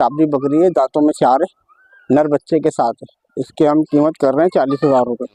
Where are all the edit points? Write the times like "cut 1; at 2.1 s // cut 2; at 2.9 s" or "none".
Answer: none